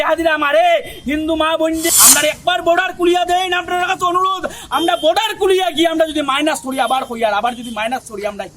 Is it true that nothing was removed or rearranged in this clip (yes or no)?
no